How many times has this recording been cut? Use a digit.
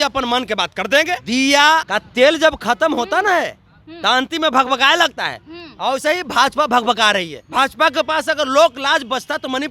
3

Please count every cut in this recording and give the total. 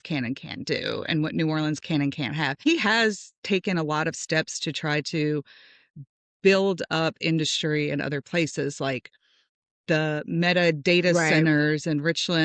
1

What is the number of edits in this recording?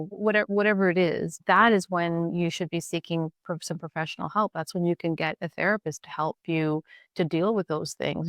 0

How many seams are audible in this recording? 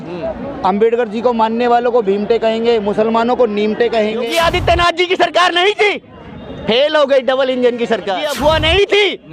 2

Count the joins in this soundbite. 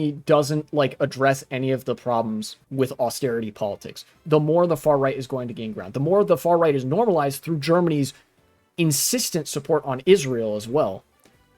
1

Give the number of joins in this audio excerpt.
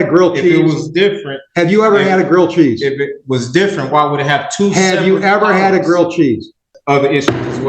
1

